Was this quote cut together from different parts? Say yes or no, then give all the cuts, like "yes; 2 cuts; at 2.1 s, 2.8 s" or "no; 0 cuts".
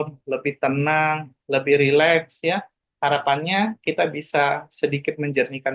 no; 0 cuts